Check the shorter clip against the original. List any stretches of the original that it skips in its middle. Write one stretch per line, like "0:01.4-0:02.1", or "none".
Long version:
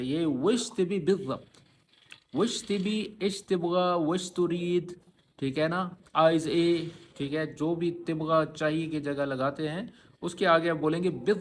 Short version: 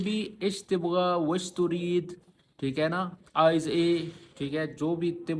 none